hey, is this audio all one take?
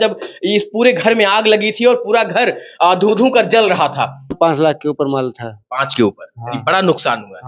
no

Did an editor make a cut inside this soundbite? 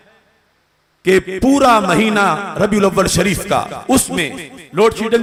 no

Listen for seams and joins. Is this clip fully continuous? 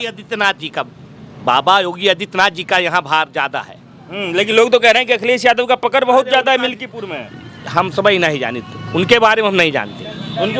yes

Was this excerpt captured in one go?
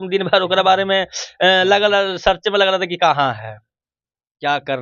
yes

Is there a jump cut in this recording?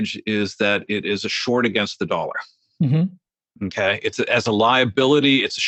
no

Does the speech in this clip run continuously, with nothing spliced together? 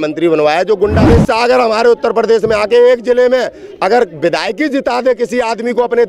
no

